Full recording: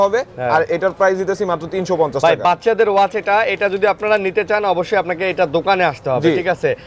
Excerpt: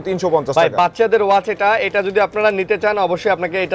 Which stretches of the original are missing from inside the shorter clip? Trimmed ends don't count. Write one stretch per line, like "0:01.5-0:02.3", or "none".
none

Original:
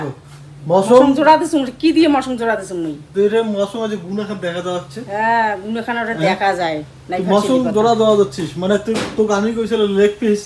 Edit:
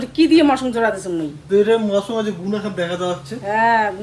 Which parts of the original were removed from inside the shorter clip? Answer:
none

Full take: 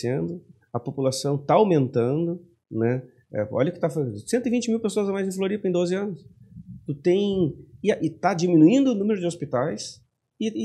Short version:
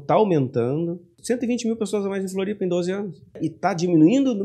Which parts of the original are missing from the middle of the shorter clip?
0:02.5-0:04.2
0:06.4-0:08.0

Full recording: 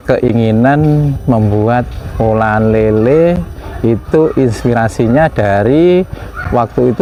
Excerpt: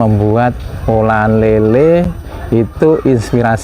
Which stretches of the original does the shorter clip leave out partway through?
none

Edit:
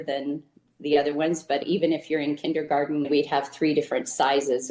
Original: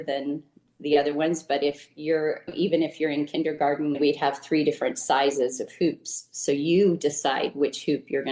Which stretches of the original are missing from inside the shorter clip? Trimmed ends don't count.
0:01.6-0:02.5

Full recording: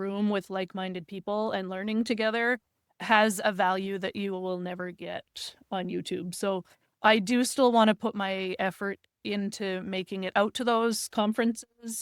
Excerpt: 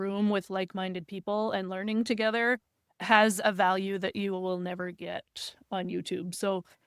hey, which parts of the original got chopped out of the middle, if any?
none

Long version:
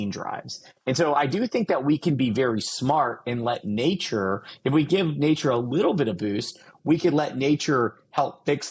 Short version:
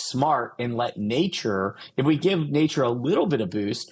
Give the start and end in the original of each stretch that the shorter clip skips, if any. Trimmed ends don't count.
none

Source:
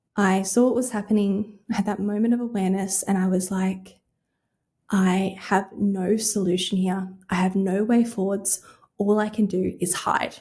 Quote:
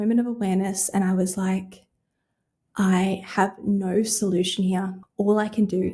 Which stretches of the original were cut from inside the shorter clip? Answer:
0:07.1-0:08.8

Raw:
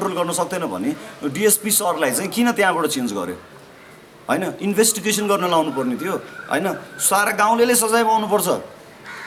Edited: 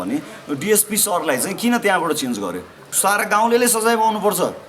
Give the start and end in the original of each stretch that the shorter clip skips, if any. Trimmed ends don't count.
0:03.6-0:06.9

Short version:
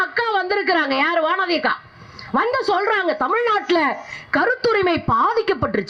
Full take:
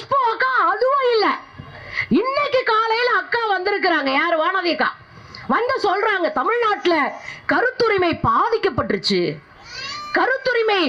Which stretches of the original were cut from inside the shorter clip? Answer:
none

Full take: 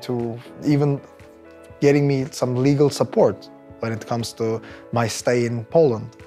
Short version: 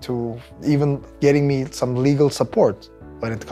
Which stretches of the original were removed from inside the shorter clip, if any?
0:01.1-0:01.7

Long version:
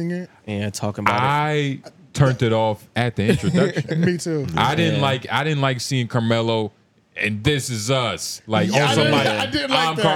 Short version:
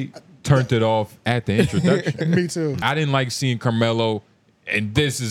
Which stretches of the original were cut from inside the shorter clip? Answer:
0:04.5-0:05.3

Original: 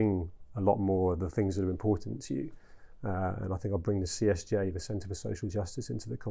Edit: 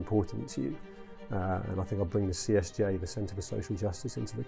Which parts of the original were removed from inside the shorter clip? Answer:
none

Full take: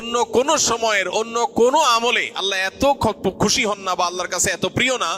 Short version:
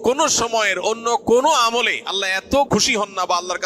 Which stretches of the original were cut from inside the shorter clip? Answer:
0:03.0-0:03.4

